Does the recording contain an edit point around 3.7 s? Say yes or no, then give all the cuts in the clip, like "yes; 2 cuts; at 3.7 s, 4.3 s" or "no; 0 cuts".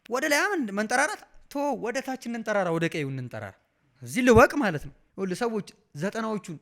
no; 1 cut; at 5.0 s